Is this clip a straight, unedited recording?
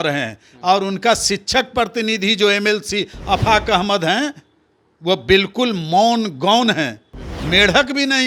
yes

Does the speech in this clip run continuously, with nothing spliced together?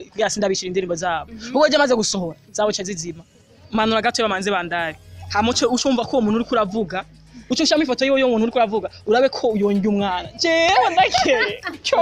no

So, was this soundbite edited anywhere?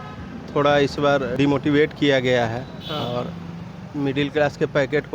yes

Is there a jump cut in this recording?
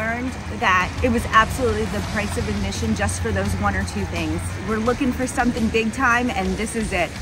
yes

